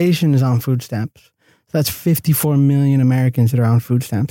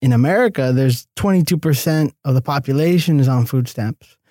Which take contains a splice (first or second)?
second